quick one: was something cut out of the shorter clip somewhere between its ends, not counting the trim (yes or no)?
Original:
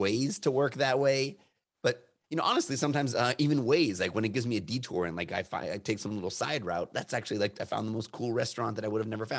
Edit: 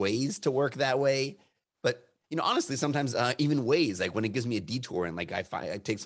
no